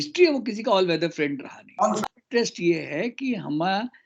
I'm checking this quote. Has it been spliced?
yes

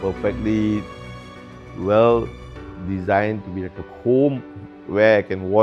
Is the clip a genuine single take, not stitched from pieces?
yes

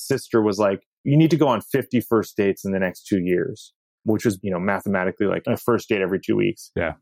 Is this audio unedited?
no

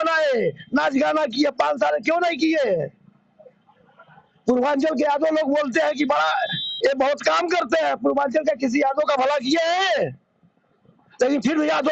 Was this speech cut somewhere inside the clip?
no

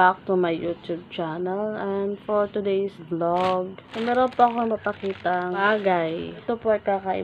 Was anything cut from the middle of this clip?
yes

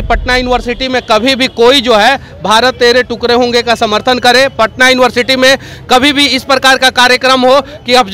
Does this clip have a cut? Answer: no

